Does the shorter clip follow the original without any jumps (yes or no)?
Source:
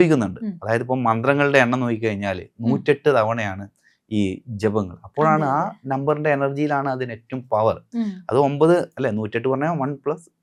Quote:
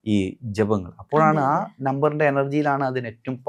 yes